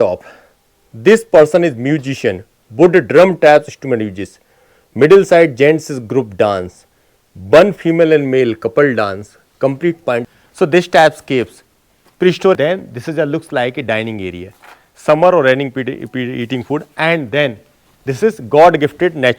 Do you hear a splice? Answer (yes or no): yes